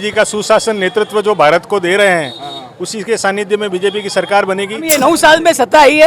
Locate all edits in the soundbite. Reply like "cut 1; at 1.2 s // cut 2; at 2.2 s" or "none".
cut 1; at 4.8 s